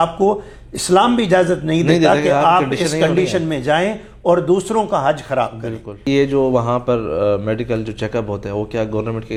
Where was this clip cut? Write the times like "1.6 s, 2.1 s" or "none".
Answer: none